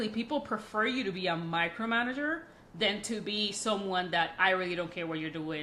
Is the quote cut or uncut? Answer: uncut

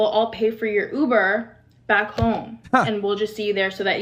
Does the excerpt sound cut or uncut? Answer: uncut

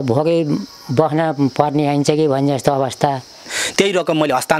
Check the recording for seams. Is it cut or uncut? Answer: cut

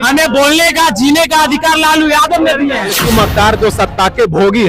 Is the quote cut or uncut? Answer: cut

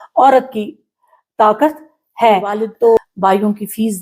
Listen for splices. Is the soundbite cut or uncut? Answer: cut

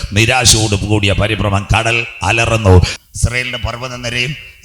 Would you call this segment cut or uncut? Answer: cut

